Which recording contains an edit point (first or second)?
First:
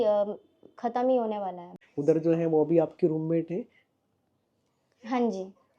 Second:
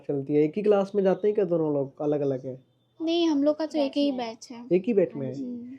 first